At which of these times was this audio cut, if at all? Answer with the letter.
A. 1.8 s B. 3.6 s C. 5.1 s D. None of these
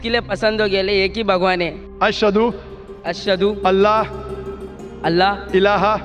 A